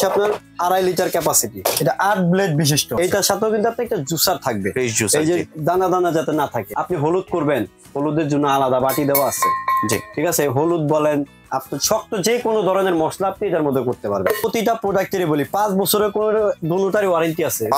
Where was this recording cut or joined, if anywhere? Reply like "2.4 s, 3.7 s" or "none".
1.6 s, 3.0 s, 6.7 s, 14.4 s